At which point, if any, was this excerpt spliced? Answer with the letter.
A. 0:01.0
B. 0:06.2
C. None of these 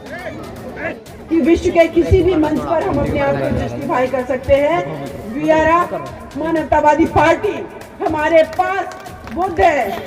A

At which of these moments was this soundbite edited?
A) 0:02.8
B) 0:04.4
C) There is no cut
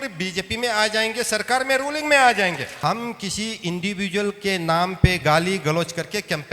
A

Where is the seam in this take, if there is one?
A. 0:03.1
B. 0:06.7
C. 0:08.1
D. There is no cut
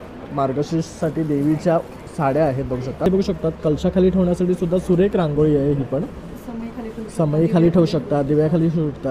A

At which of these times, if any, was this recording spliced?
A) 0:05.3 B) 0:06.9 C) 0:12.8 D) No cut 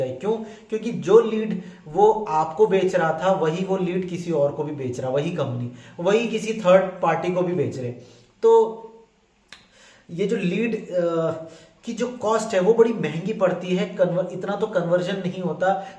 D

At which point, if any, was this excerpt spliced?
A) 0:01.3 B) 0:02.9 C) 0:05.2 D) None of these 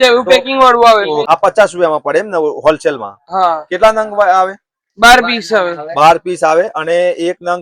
A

